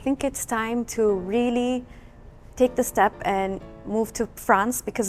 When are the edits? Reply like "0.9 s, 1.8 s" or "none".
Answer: none